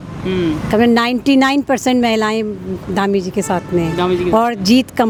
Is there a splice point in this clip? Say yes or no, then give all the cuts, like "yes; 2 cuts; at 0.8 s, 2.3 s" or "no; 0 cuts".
no; 0 cuts